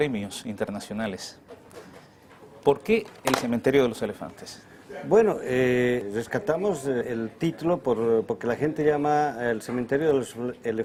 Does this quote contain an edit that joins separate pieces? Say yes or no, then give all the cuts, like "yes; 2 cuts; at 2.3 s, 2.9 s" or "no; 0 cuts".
no; 0 cuts